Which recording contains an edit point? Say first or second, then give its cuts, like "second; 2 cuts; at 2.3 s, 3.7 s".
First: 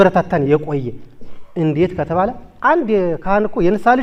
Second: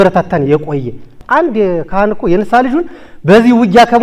second; 1 cut; at 1.1 s